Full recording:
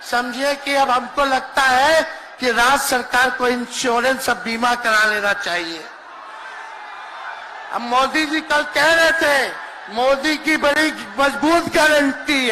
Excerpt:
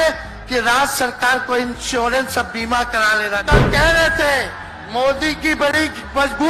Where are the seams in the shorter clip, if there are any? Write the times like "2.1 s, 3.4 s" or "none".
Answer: 3.4 s